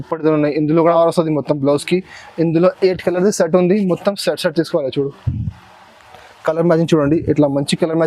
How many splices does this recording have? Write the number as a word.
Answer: one